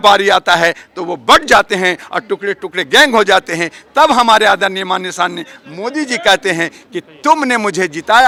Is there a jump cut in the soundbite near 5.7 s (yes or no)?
no